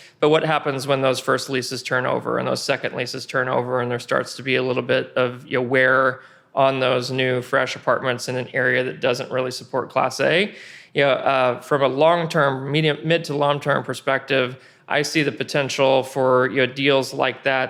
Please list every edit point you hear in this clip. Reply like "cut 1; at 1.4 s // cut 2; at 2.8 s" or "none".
none